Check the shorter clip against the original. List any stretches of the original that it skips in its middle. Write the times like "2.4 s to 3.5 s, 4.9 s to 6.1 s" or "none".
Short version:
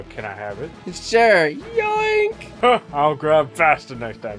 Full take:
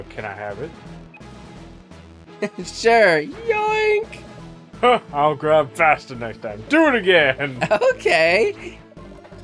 0.9 s to 2.6 s, 4.2 s to 4.6 s